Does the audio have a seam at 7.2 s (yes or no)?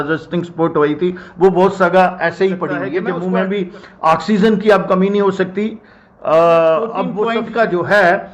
yes